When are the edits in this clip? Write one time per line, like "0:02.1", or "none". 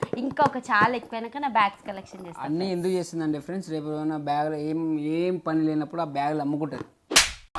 none